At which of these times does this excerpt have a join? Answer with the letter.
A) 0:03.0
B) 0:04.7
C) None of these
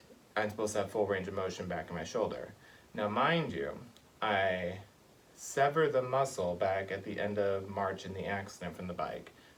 C